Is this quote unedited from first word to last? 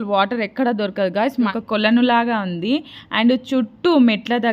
no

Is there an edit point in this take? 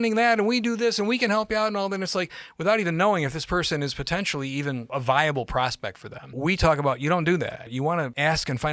yes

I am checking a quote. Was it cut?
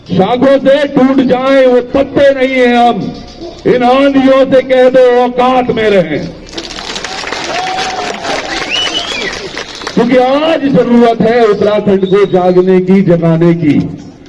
no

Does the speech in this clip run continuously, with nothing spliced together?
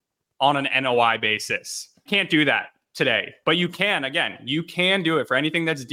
no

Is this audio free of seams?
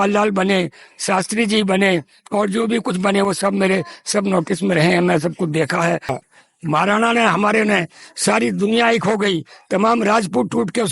no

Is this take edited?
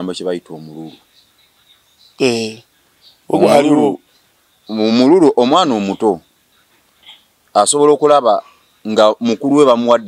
no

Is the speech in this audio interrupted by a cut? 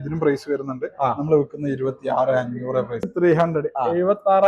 yes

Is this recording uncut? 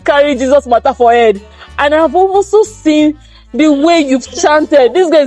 yes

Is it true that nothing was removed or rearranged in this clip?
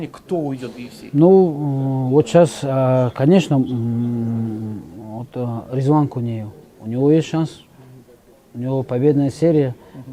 yes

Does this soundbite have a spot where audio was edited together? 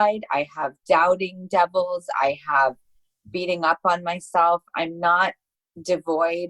no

